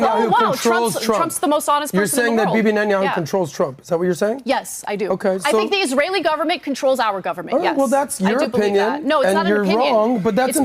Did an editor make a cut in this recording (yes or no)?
no